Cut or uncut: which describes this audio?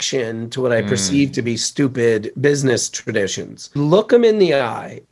cut